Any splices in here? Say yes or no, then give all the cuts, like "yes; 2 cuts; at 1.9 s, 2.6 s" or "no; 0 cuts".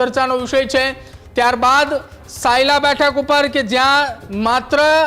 no; 0 cuts